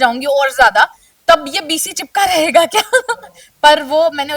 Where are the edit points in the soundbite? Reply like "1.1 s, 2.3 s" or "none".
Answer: none